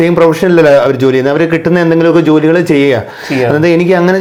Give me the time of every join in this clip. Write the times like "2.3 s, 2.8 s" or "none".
none